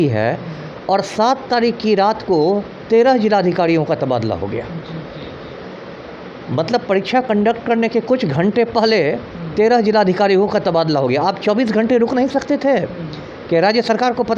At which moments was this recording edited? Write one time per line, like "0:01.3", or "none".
none